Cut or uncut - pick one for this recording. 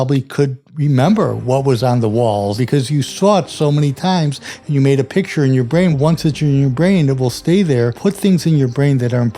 cut